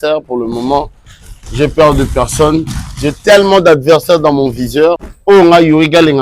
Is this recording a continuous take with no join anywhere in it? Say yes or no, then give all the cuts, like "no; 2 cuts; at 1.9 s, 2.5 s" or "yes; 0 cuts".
no; 1 cut; at 5.1 s